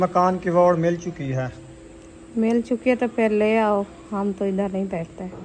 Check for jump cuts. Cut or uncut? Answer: uncut